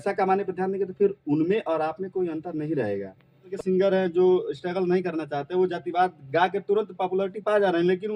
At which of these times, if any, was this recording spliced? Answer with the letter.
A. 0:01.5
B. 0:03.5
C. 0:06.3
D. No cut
B